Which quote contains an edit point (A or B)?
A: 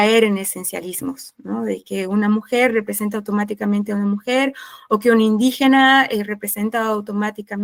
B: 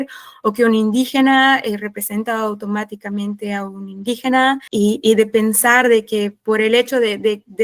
B